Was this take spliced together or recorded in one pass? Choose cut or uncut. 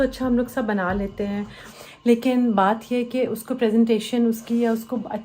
cut